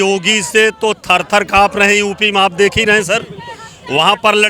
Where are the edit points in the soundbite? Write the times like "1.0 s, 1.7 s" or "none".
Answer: none